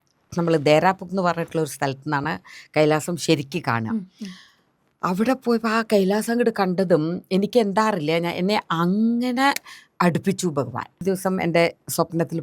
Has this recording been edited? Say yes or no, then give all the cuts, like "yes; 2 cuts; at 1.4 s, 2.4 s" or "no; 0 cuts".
yes; 1 cut; at 11.0 s